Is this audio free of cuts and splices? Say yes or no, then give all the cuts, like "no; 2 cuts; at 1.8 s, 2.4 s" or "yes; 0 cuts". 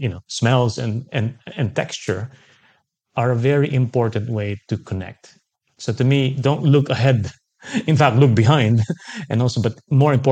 yes; 0 cuts